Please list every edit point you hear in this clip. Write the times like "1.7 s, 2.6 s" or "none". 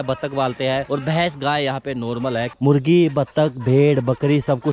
0.9 s, 2.5 s